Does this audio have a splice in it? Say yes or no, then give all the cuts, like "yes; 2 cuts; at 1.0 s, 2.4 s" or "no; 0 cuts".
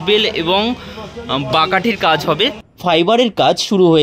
yes; 1 cut; at 2.6 s